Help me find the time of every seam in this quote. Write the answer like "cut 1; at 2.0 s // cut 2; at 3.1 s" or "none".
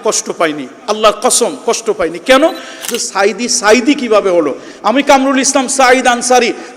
cut 1; at 3.0 s